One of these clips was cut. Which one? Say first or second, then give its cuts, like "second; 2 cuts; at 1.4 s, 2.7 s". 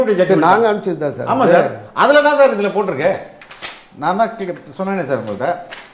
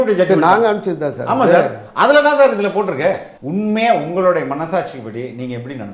second; 1 cut; at 3.3 s